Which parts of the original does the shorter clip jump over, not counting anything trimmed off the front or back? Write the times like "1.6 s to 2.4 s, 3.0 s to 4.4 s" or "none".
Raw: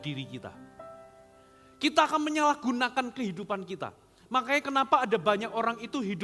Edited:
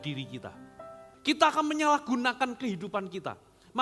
1.0 s to 1.6 s